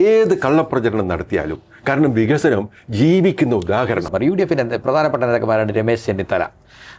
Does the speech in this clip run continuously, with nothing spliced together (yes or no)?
no